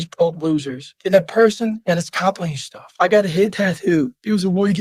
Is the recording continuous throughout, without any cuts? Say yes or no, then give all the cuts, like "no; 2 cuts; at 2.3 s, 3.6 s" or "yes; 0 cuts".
yes; 0 cuts